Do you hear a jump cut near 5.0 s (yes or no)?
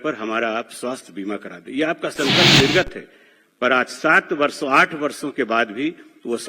no